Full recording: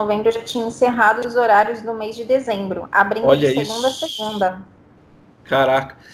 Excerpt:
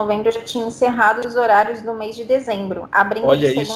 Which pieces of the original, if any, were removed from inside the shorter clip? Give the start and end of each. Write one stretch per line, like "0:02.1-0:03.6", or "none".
none